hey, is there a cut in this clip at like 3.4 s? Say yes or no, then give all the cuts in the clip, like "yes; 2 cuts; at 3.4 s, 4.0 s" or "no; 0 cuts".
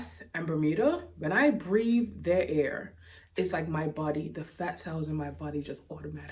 no; 0 cuts